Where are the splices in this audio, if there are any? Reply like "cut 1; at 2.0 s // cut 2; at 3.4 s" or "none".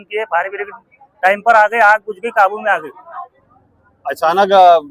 none